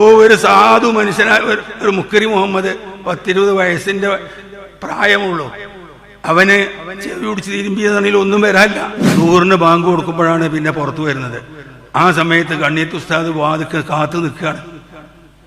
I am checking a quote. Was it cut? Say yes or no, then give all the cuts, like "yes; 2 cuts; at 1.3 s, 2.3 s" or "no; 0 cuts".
yes; 1 cut; at 9.0 s